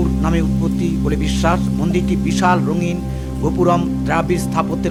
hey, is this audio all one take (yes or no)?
yes